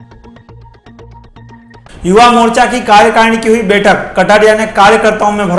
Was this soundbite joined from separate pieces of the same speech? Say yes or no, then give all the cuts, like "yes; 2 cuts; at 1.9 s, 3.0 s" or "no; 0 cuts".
no; 0 cuts